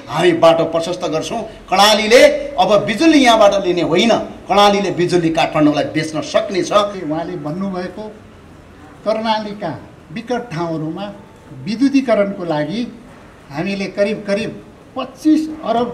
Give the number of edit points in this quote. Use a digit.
1